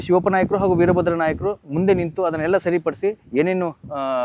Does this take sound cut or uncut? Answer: uncut